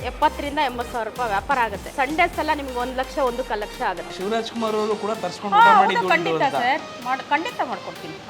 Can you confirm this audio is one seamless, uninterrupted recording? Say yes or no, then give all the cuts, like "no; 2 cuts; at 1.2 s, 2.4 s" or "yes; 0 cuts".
no; 2 cuts; at 1.9 s, 4.1 s